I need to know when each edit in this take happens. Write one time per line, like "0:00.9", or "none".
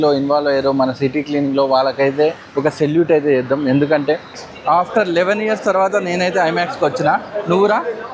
0:04.4